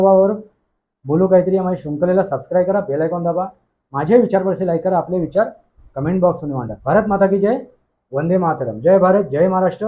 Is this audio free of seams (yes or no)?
no